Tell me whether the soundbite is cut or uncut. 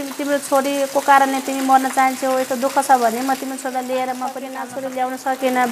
cut